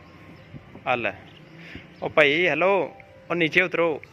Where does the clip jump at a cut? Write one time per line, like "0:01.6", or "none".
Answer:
none